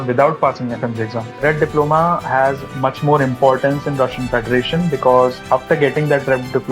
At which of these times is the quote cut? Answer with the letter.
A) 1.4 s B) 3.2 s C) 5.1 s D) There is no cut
A